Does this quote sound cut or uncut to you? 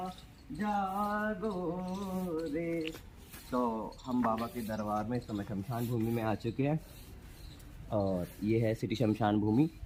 uncut